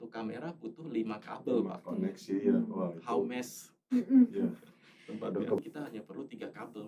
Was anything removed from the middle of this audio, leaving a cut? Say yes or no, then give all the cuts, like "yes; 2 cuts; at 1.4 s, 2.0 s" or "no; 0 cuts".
yes; 1 cut; at 5.6 s